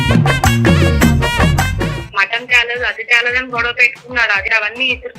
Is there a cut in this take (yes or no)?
yes